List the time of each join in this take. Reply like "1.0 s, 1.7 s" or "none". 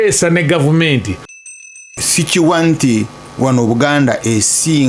1.5 s